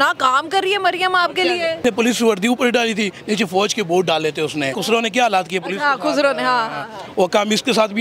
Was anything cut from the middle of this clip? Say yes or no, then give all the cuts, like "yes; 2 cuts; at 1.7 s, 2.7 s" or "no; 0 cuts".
yes; 2 cuts; at 1.8 s, 4.8 s